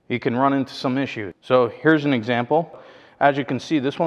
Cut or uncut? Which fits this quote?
cut